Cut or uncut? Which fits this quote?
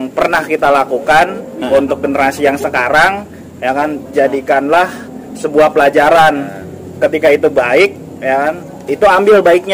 uncut